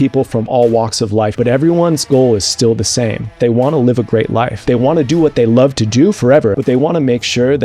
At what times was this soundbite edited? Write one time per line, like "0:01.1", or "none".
0:01.3
0:03.4
0:04.6
0:06.6